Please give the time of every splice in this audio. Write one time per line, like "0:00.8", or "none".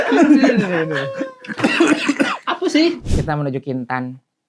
0:03.0